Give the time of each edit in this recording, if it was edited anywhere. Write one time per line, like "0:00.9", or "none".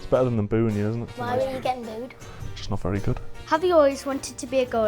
0:01.1
0:03.3